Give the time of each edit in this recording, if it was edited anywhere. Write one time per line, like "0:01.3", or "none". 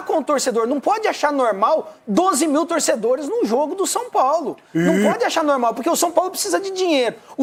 none